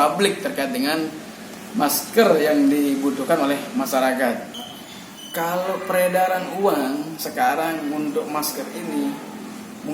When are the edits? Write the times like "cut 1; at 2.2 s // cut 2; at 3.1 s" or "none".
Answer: cut 1; at 4.5 s